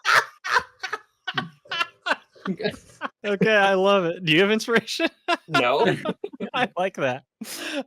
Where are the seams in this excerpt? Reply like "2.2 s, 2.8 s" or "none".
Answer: 3.1 s